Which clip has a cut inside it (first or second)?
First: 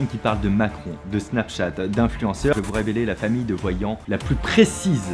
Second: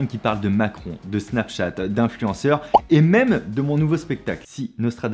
first